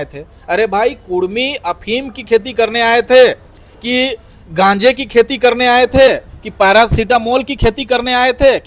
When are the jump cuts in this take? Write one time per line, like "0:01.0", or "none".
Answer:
none